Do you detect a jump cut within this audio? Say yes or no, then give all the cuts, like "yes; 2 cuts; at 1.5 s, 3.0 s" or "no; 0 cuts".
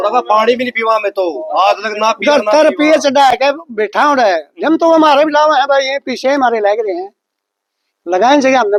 no; 0 cuts